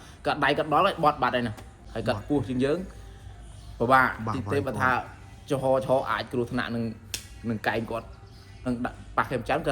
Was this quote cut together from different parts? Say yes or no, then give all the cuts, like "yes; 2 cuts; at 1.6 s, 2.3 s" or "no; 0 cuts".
yes; 2 cuts; at 1.8 s, 8.7 s